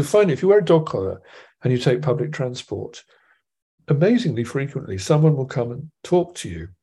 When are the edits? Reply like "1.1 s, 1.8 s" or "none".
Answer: none